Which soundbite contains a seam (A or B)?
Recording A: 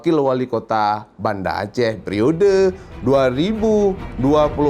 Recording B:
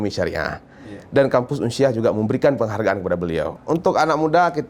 B